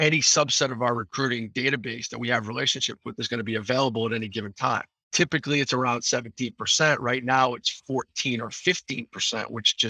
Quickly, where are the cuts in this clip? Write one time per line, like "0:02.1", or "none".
0:05.0